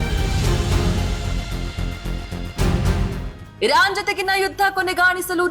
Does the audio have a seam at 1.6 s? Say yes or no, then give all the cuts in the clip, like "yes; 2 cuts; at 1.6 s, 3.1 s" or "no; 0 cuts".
no; 1 cut; at 3.1 s